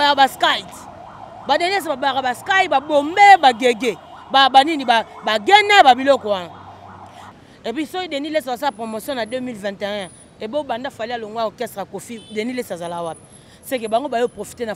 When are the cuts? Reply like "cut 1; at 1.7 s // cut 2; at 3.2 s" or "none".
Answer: cut 1; at 7.4 s

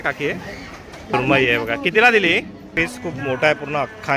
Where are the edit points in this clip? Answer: cut 1; at 1.1 s // cut 2; at 2.7 s

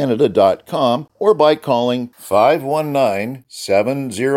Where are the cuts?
cut 1; at 1.1 s

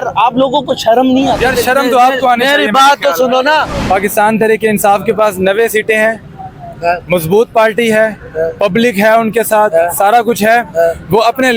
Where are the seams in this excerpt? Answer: cut 1; at 1.4 s // cut 2; at 3.8 s

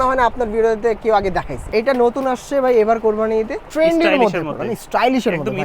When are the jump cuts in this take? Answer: cut 1; at 1.6 s // cut 2; at 3.6 s

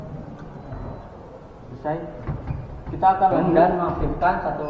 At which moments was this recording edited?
cut 1; at 3.4 s

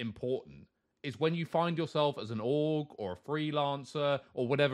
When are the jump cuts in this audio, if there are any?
none

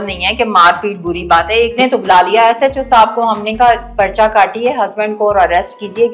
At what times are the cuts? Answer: cut 1; at 1.7 s

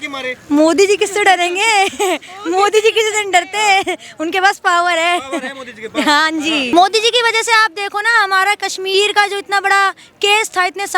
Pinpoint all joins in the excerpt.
cut 1; at 6.7 s

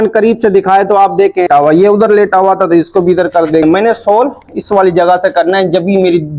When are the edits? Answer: cut 1; at 1.5 s // cut 2; at 3.6 s

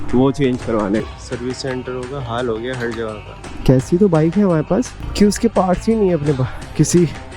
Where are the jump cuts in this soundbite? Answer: cut 1; at 1.1 s // cut 2; at 3.5 s

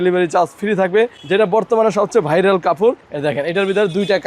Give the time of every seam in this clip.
cut 1; at 3.1 s

